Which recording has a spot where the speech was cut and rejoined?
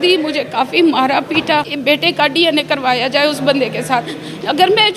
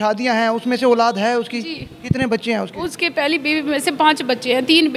first; 1 cut; at 1.7 s

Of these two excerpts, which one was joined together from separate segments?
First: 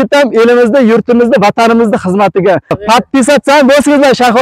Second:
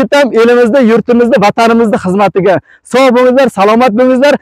first; 1 cut; at 2.8 s

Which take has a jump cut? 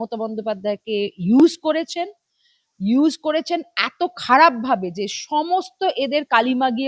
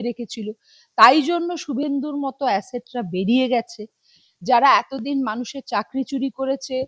second; 1 cut; at 4.1 s

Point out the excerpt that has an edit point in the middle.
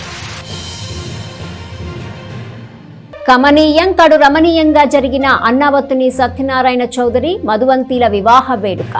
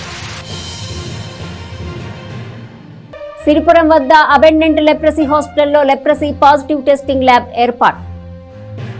first; 1 cut; at 3.2 s

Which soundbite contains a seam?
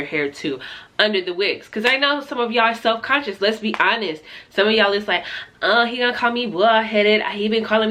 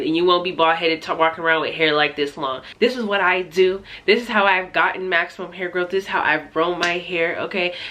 second; 1 cut; at 2.6 s

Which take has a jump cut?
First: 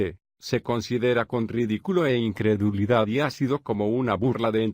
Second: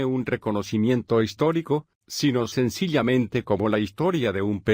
first; 1 cut; at 2.9 s

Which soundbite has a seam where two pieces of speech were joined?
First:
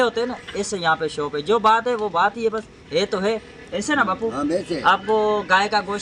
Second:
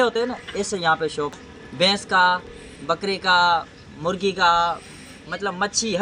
second; 1 cut; at 1.4 s

